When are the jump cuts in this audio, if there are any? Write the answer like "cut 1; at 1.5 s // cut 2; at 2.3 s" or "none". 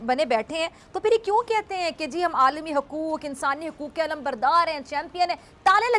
none